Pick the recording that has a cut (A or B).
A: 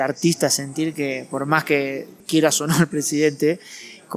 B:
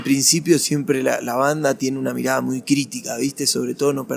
A